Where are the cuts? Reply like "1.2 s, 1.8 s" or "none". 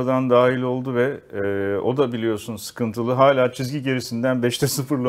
none